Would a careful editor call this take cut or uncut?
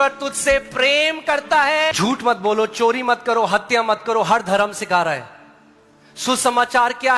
cut